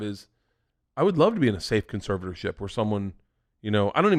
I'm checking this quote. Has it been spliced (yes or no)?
no